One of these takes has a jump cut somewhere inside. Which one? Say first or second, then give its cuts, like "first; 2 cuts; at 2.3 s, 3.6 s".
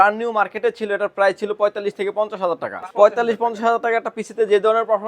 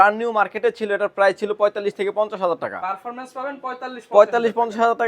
first; 1 cut; at 2.8 s